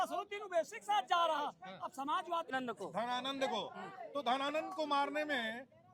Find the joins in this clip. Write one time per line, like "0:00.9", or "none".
0:02.5